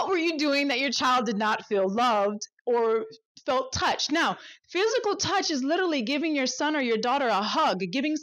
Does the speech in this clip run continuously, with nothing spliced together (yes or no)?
yes